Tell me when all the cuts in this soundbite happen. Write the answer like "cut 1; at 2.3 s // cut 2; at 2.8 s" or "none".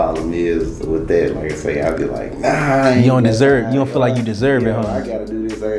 none